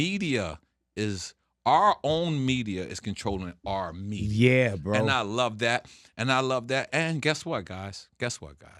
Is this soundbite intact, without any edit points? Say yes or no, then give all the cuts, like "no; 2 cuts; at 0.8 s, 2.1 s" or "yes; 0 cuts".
yes; 0 cuts